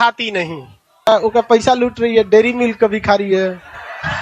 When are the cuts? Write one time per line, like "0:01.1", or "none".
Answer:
0:01.1